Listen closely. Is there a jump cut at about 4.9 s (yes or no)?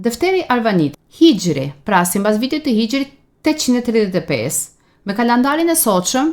no